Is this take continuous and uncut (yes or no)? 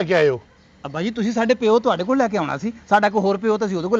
yes